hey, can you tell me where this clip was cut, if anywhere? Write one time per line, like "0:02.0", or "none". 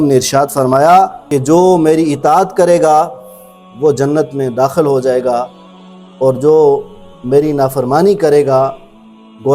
0:01.2